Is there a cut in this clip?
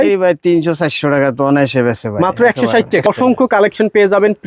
yes; 1 cut; at 3.1 s

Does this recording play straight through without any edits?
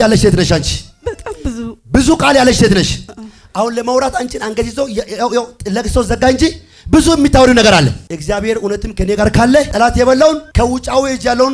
no; 3 cuts; at 8.1 s, 9.7 s, 10.5 s

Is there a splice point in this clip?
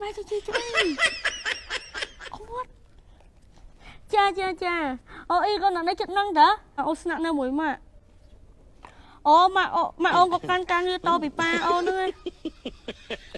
yes; 1 cut; at 6.8 s

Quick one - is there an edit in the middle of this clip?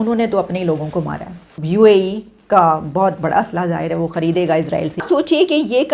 yes; 2 cuts; at 1.4 s, 5.0 s

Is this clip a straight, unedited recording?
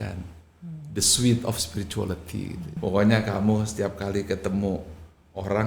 no; 1 cut; at 2.7 s

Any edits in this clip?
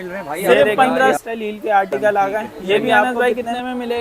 yes; 2 cuts; at 1.2 s, 3.0 s

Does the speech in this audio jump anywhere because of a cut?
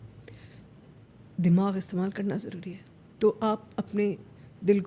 no; 0 cuts

